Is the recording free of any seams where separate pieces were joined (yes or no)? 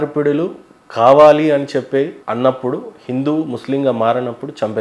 no